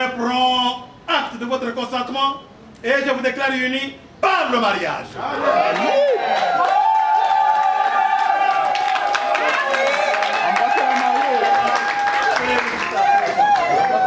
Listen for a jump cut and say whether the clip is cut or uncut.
uncut